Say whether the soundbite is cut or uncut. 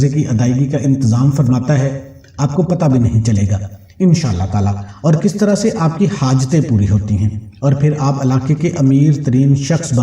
uncut